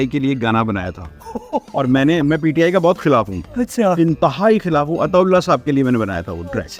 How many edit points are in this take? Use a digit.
0